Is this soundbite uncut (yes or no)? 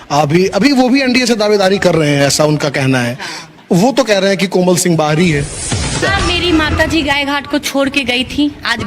no